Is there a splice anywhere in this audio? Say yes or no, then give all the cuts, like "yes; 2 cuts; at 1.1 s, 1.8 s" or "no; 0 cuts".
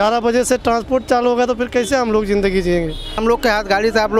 yes; 1 cut; at 3.2 s